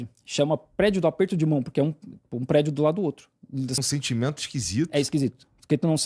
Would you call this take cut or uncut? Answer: cut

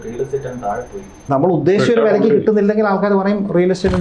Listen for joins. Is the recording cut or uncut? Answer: cut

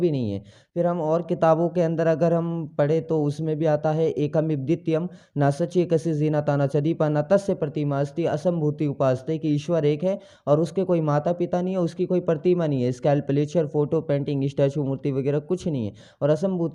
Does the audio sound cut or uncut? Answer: uncut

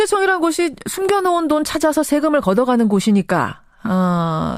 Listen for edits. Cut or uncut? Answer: cut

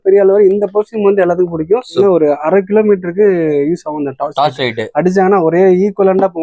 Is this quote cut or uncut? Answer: cut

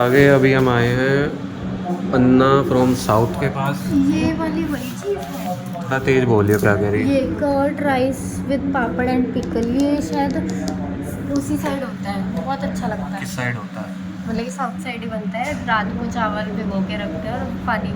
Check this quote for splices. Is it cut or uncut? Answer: uncut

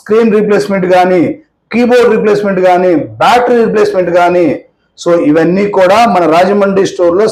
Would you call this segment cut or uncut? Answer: uncut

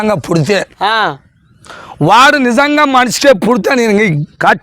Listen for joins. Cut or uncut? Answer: uncut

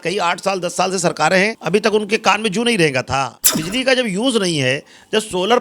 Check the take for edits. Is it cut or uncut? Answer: cut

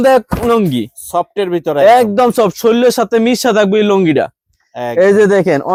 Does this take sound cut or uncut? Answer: uncut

